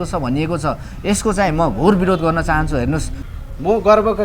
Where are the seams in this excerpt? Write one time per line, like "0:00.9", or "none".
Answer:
0:03.2